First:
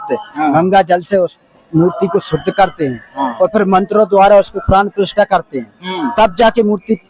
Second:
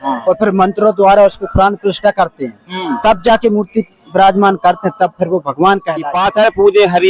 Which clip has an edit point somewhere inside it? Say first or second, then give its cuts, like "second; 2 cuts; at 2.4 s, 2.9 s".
second; 1 cut; at 6.1 s